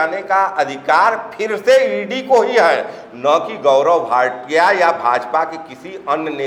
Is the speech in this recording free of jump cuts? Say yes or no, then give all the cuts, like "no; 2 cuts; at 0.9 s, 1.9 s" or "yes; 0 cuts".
yes; 0 cuts